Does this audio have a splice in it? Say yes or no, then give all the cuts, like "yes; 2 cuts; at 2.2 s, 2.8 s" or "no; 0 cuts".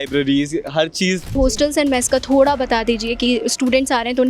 yes; 1 cut; at 1.3 s